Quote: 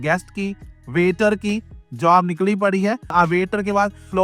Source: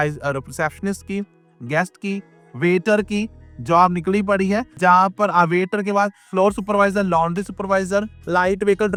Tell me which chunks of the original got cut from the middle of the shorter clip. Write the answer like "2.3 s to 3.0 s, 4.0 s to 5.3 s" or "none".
4.8 s to 5.3 s